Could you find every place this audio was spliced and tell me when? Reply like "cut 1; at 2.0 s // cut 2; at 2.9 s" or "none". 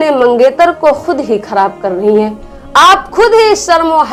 none